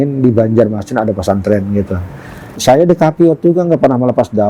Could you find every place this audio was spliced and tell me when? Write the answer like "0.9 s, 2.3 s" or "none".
2.5 s

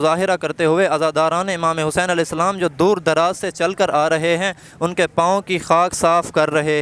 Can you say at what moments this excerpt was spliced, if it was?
none

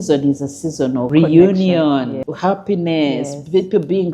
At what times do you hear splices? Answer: 1.1 s, 2.2 s

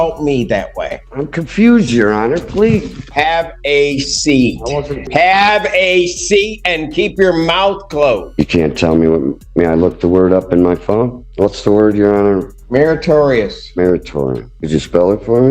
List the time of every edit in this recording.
1.0 s, 3.1 s, 5.1 s, 8.3 s, 11.2 s, 12.5 s, 14.5 s

